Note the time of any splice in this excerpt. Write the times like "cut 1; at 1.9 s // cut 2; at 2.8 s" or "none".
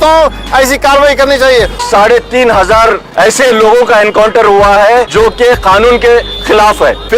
cut 1; at 1.8 s // cut 2; at 3.0 s // cut 3; at 5.1 s